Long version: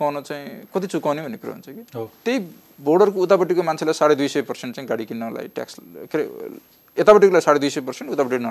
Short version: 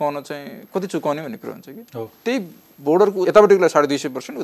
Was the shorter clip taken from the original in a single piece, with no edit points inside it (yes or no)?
no